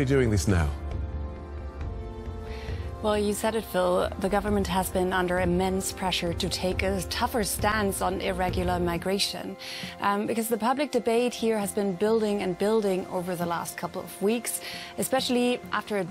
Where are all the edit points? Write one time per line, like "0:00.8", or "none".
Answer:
none